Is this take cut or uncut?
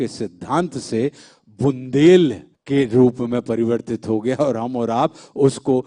cut